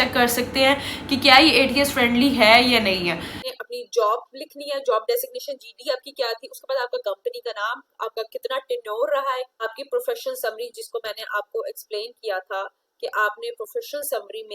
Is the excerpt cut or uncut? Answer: cut